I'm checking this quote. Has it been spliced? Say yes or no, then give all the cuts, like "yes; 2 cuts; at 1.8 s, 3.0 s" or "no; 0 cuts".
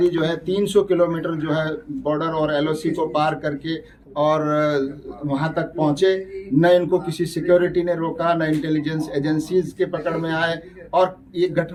no; 0 cuts